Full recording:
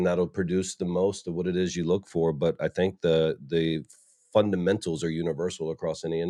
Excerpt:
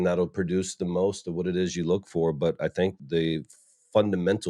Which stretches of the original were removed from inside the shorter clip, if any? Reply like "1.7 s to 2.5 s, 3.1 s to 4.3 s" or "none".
3.0 s to 3.4 s